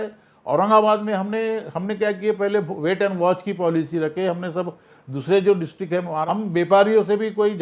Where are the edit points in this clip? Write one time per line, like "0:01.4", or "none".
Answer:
0:06.2